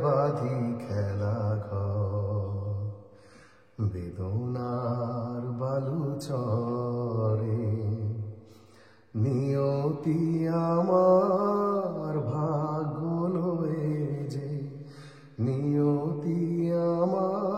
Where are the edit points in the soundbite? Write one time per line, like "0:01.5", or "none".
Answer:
none